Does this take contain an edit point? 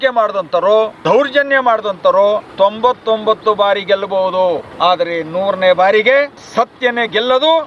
yes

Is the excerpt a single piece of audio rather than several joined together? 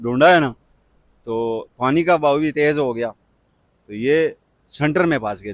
yes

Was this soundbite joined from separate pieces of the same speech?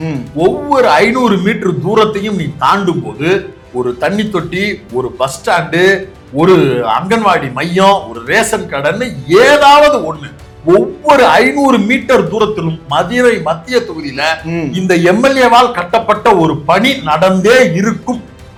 no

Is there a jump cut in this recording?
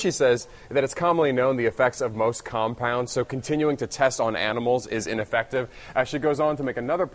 no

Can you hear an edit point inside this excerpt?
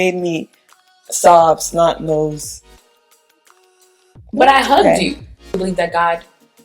yes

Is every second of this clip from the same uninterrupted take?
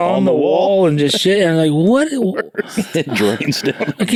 yes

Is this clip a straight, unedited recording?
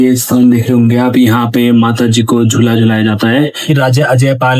no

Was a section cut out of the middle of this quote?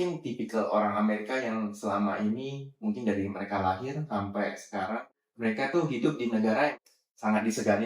yes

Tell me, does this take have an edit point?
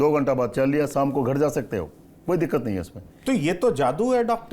no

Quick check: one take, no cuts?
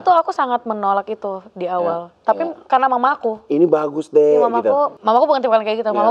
no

